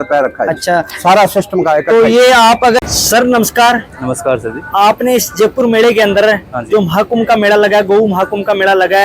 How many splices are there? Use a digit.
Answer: 1